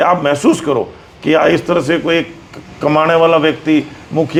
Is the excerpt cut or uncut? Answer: uncut